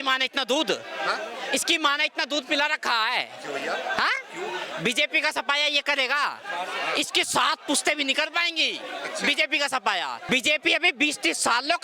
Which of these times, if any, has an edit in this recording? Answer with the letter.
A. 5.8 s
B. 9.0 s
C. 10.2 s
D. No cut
C